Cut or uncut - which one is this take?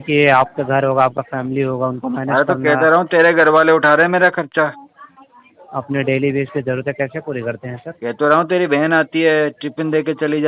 uncut